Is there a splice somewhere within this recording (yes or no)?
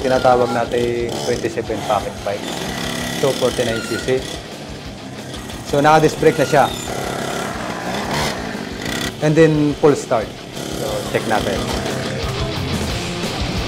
no